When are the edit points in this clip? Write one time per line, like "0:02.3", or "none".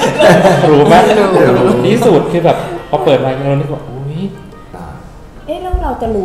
0:04.8

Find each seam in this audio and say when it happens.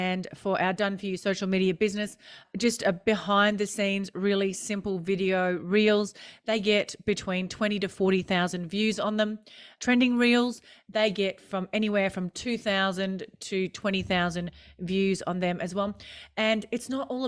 none

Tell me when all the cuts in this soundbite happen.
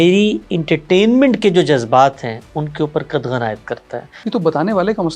0:04.1

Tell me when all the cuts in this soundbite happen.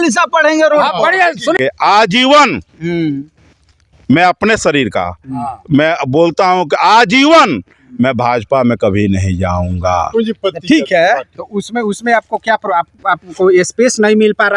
0:01.6

